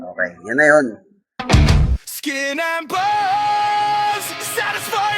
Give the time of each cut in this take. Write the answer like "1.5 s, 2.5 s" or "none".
1.4 s